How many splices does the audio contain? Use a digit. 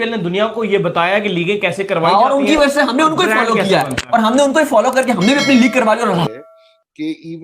1